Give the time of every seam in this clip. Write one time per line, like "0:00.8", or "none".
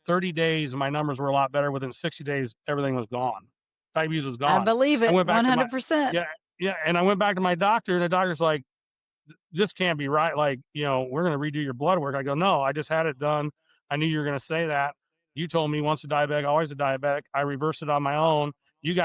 none